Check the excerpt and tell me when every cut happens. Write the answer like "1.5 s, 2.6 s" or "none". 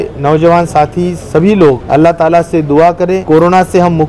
1.8 s, 3.2 s